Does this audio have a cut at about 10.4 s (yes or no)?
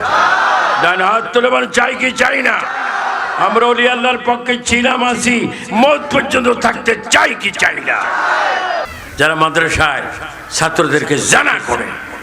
no